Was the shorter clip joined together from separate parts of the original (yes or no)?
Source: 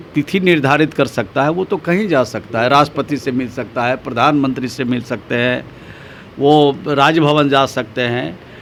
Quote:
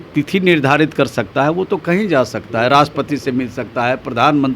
no